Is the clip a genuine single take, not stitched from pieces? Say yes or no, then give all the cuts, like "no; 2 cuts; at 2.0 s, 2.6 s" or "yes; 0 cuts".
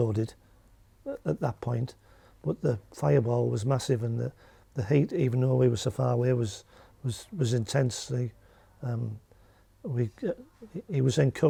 yes; 0 cuts